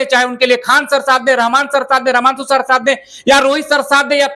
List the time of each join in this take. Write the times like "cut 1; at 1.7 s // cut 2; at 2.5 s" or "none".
none